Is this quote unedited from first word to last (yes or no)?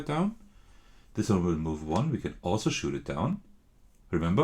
yes